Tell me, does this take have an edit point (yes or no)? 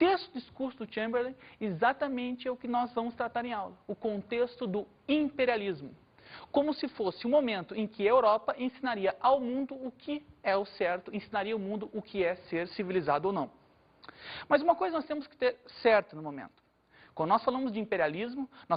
no